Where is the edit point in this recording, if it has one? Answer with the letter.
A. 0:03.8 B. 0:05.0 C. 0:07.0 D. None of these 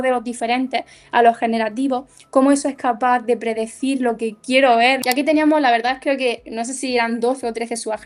B